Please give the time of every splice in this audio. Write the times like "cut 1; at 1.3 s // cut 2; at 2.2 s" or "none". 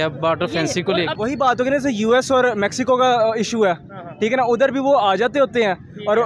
cut 1; at 1.1 s